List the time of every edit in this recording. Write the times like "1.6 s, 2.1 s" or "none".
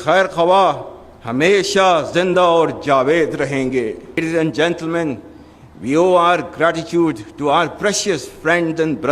4.2 s